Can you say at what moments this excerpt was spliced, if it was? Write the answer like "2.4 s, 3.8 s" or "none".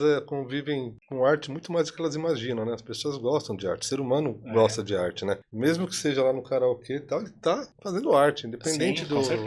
1.0 s, 5.5 s, 7.7 s